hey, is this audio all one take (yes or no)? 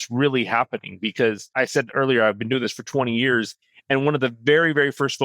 no